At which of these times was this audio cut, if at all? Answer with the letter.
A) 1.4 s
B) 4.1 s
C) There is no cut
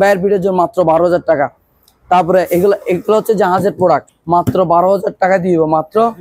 B